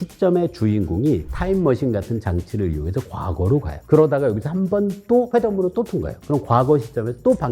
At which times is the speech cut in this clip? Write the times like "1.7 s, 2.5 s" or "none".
3.8 s, 5.3 s